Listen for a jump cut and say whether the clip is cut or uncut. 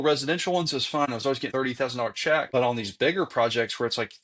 cut